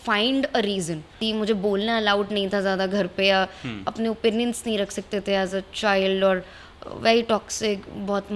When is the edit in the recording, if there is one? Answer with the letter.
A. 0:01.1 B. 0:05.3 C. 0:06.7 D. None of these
A